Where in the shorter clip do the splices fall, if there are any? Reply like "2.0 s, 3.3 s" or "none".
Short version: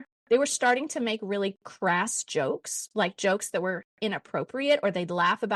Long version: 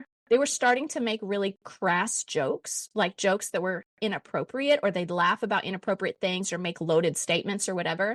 none